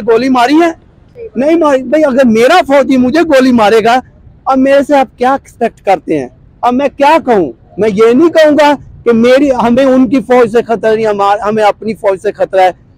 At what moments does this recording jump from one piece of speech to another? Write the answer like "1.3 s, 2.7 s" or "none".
none